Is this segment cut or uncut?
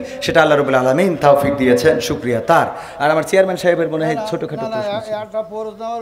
uncut